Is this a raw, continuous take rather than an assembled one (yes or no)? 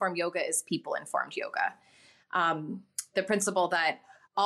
yes